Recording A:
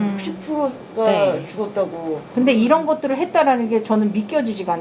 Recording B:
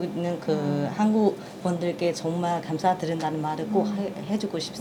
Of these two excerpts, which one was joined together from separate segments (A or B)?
A